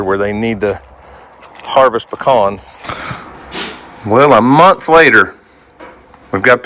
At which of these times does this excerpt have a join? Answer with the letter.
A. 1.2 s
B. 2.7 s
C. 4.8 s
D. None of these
B